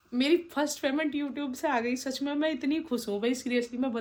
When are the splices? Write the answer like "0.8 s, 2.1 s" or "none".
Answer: none